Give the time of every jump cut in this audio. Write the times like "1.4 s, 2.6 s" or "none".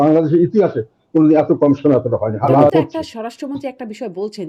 2.7 s

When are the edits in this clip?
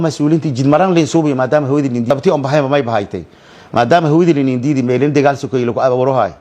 2.1 s

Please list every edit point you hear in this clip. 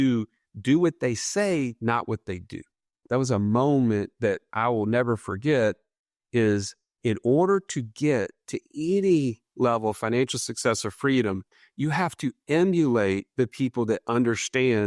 3.0 s

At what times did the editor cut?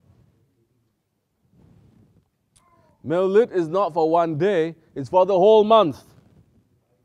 none

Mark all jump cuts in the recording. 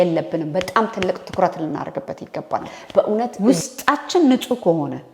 3.3 s

